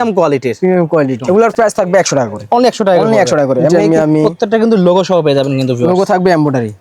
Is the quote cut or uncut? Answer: cut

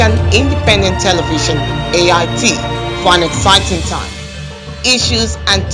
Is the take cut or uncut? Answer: uncut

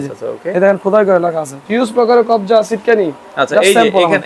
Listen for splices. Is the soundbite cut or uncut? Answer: cut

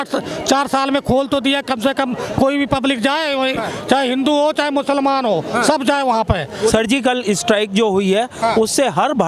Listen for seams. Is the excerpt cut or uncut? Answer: cut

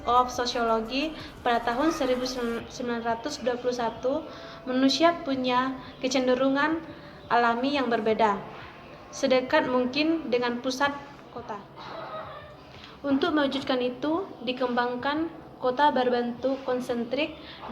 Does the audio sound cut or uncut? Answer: cut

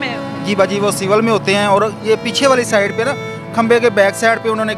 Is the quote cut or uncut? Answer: uncut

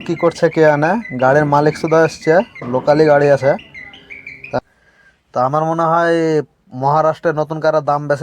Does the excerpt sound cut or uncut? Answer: cut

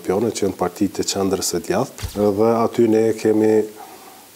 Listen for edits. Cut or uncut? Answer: cut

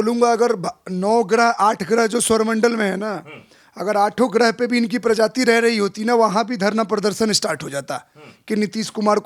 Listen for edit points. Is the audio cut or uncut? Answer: uncut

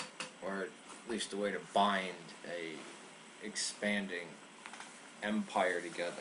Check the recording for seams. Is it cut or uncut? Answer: cut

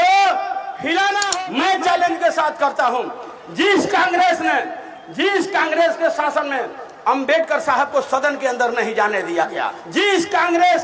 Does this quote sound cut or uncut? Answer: cut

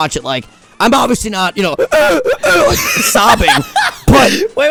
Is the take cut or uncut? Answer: uncut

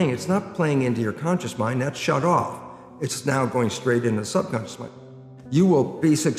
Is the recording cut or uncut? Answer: cut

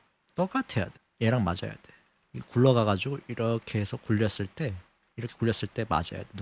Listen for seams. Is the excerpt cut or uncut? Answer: uncut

